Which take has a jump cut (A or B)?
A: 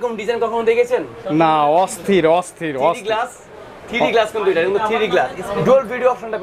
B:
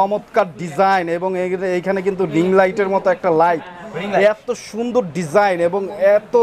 A